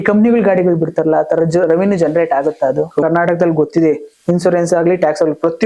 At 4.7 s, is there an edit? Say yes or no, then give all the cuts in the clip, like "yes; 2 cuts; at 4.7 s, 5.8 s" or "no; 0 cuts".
no; 1 cut; at 3.0 s